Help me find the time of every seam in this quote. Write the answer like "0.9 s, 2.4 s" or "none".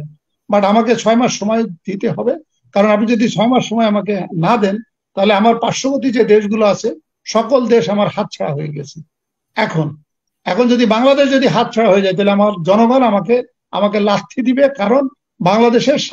none